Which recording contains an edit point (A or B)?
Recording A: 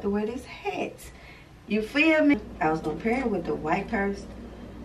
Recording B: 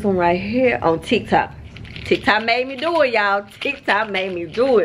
A